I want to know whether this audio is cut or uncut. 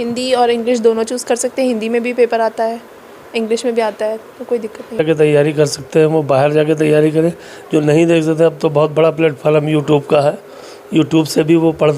cut